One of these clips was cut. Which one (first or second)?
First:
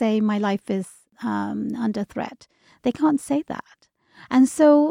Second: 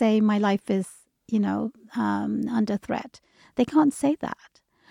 first